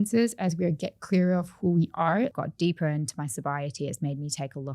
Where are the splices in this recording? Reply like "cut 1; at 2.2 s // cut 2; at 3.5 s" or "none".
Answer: cut 1; at 2.3 s